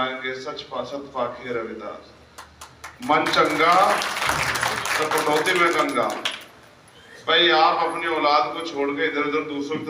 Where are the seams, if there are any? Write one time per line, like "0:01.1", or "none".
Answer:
none